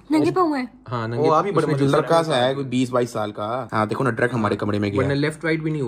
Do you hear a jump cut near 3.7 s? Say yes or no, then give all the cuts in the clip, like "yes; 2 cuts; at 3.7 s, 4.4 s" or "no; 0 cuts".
no; 0 cuts